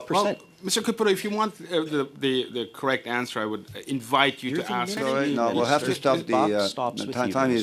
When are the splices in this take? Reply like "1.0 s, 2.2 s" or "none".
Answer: 5.0 s